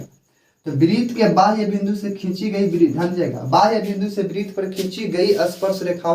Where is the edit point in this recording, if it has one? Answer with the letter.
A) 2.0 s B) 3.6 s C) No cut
C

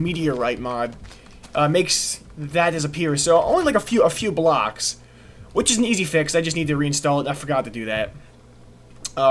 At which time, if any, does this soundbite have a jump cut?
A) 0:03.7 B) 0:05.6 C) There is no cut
A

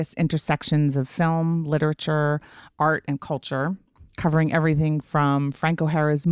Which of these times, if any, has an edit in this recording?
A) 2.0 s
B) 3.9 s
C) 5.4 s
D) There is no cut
D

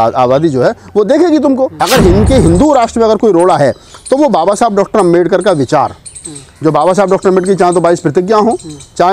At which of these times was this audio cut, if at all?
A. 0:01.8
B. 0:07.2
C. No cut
A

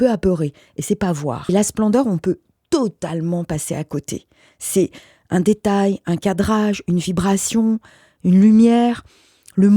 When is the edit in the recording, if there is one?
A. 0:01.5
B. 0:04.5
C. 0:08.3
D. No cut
A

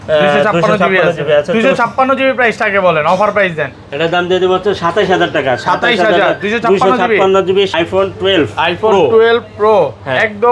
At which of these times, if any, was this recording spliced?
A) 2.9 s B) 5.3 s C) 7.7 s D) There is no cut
C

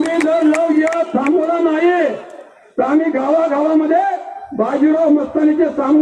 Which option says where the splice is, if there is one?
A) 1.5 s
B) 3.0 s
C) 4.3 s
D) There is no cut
D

